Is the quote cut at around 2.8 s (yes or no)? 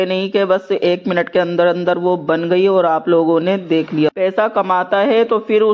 no